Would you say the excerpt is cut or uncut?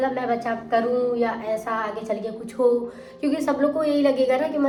uncut